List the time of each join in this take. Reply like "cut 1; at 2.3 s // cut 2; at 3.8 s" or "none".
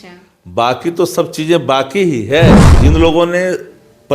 cut 1; at 2.6 s

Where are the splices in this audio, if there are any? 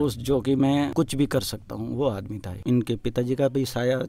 cut 1; at 2.6 s

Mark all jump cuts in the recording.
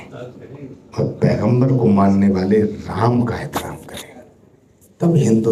none

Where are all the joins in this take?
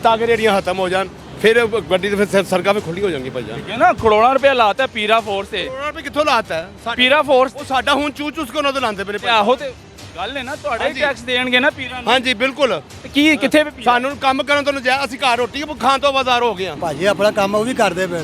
cut 1; at 1.2 s // cut 2; at 12.9 s // cut 3; at 16.7 s

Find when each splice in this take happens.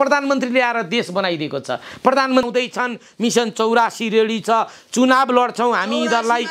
cut 1; at 2.5 s

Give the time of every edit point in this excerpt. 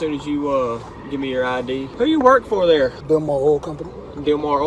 cut 1; at 1.9 s // cut 2; at 3.0 s

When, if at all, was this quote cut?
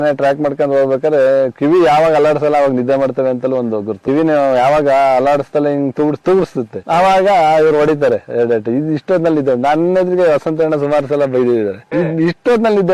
none

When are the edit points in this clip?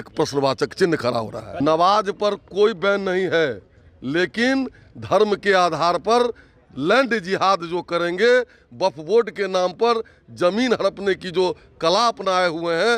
cut 1; at 1.6 s

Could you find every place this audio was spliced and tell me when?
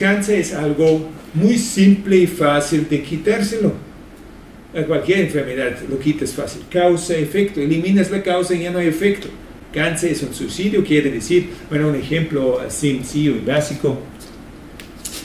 none

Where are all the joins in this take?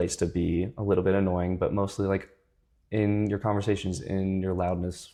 none

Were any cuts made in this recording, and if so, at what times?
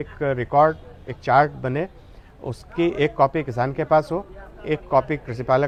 none

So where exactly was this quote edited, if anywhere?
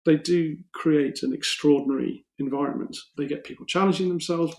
cut 1; at 3.0 s

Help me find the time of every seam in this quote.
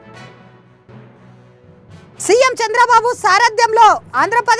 cut 1; at 1.0 s

